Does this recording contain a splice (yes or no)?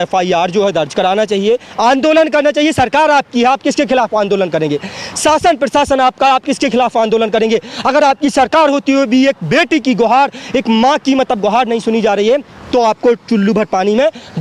no